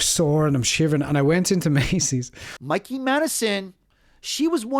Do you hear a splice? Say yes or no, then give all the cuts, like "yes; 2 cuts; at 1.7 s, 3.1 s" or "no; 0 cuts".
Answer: yes; 2 cuts; at 2.4 s, 3.7 s